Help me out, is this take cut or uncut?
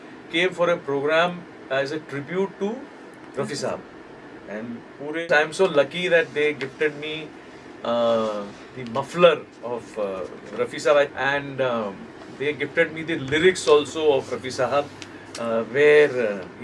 cut